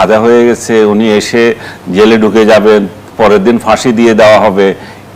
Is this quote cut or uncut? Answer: uncut